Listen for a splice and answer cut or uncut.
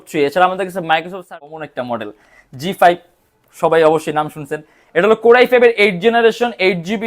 cut